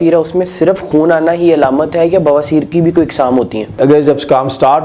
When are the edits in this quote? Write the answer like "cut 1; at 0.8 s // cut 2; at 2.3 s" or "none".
cut 1; at 3.8 s